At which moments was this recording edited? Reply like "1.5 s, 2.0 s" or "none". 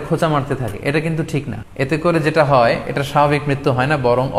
1.6 s